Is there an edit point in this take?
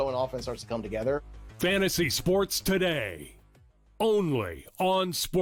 no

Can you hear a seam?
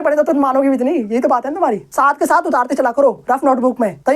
yes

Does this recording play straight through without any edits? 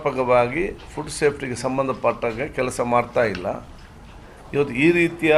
yes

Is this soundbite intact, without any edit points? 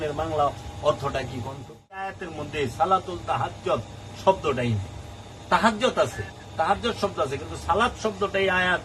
no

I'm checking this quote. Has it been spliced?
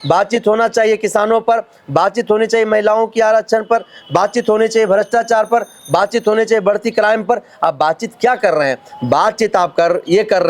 no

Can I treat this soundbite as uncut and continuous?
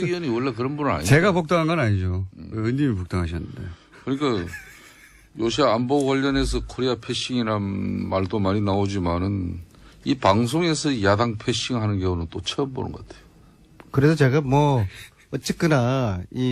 no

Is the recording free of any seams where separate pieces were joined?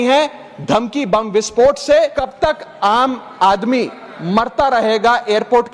no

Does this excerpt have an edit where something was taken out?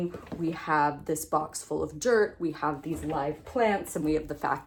no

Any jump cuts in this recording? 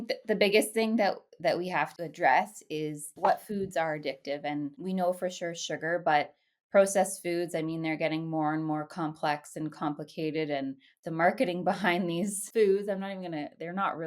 yes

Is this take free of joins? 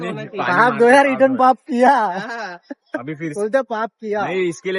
yes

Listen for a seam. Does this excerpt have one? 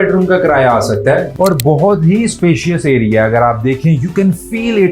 yes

